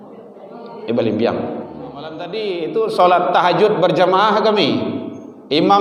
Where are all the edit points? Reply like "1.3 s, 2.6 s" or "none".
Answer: 2.3 s